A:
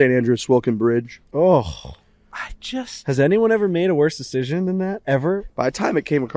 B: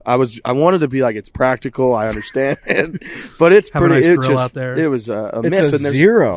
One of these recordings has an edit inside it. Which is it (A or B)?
A